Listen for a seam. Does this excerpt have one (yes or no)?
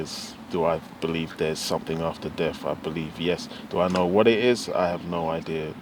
no